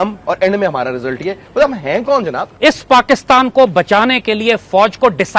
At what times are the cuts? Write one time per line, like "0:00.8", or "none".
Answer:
0:02.4